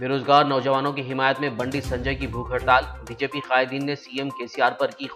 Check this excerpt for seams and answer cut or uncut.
uncut